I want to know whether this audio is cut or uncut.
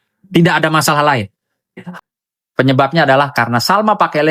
cut